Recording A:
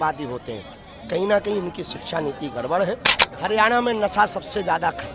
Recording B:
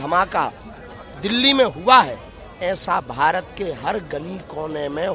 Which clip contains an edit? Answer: A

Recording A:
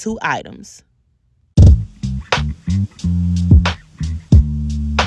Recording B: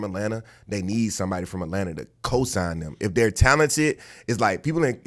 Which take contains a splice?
A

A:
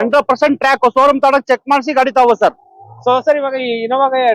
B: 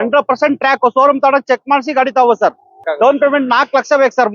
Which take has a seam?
B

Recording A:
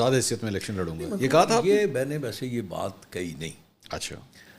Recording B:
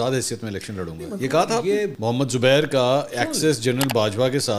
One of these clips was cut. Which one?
B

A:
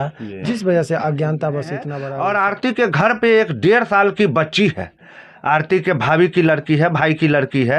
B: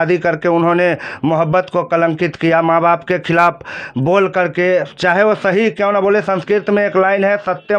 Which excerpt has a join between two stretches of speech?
A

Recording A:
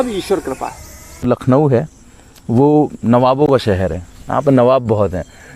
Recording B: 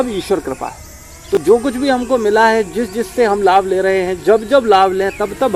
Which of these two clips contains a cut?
A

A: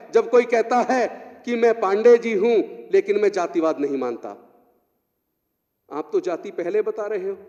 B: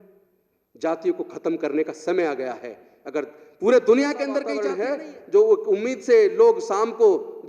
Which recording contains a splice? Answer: B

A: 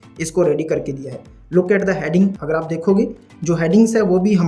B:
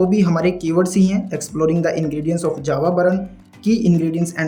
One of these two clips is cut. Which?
A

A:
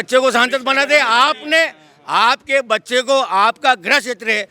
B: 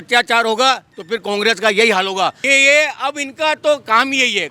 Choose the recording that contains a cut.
B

